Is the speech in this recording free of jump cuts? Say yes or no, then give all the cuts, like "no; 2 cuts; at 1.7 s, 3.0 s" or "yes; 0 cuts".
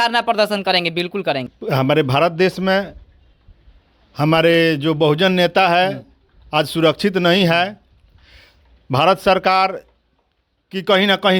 yes; 0 cuts